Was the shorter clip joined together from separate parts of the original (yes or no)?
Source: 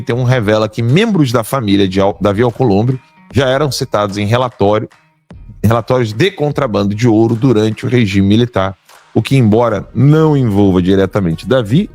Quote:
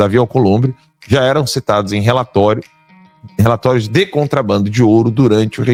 no